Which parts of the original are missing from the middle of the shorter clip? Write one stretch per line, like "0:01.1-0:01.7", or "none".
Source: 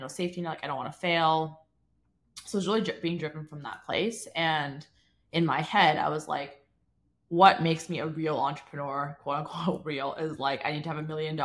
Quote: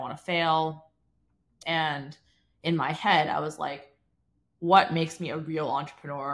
0:02.3-0:04.2